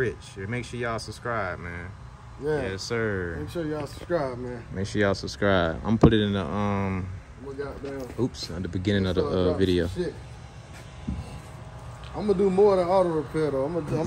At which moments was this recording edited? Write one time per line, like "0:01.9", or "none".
none